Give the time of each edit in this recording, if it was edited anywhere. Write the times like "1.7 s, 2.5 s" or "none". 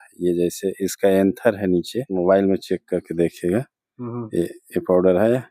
2.0 s

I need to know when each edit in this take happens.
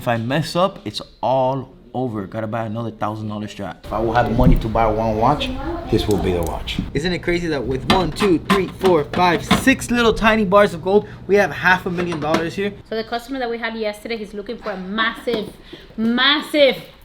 3.8 s, 6.9 s, 12.8 s

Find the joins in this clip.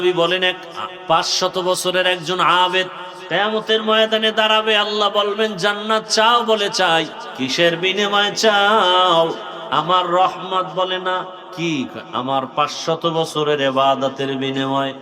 3.1 s, 7.2 s, 9.5 s, 11.4 s

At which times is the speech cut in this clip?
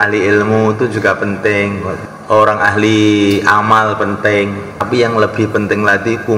1.9 s, 4.9 s

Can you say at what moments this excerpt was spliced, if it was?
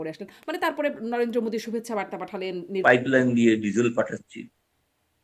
2.7 s

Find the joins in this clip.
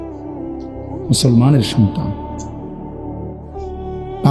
1.1 s

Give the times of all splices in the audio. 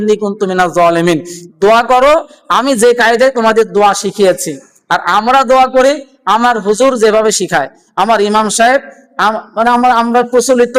none

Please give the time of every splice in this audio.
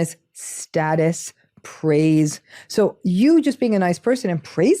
none

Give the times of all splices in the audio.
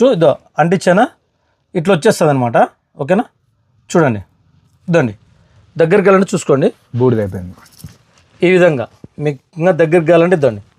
none

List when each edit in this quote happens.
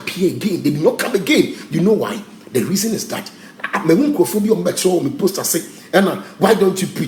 none

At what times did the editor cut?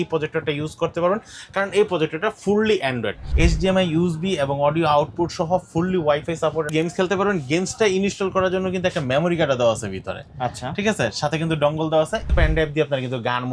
3.2 s, 6.7 s, 12.3 s

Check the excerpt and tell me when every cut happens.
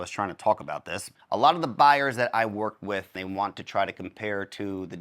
1.1 s, 3.1 s

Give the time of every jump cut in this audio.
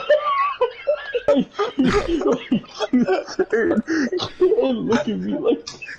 1.3 s

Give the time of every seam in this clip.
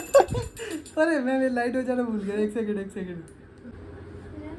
3.6 s

